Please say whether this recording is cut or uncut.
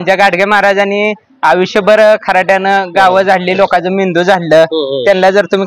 uncut